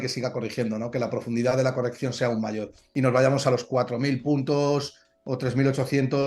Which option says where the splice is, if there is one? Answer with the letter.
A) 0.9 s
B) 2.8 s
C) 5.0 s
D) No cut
B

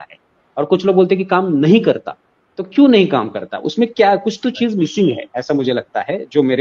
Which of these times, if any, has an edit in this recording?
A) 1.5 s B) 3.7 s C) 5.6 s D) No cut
D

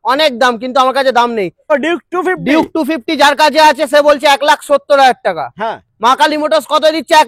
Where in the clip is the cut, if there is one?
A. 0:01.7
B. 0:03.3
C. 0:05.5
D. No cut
A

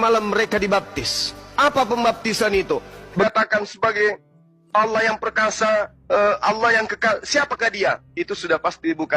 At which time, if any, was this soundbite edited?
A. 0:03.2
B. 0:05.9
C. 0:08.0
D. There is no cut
A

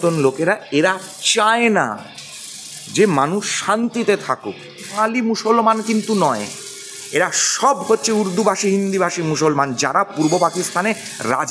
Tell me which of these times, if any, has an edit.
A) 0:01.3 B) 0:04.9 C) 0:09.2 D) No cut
B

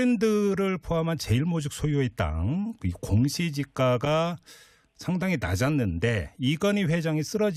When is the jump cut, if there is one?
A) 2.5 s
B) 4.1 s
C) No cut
B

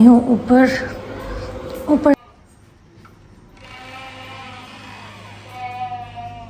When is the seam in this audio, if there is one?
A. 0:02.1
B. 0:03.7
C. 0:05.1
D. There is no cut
A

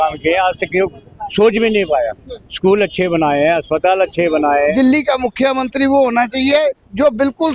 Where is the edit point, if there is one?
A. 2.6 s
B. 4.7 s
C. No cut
B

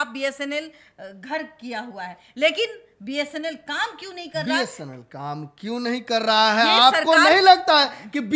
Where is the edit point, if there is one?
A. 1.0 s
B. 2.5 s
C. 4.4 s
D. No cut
D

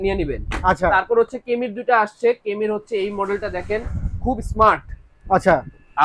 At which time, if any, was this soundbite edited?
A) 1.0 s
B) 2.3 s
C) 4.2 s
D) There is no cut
D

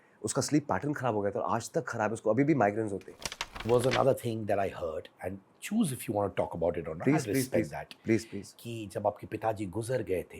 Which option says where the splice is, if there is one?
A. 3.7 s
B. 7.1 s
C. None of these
A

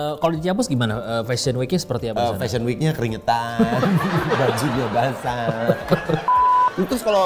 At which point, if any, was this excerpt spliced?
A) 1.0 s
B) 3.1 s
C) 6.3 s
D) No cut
C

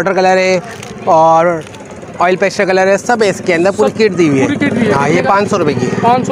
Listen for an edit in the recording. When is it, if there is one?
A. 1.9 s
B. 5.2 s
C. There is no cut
C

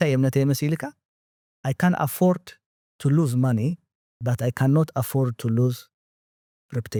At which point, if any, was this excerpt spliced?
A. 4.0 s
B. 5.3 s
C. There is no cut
C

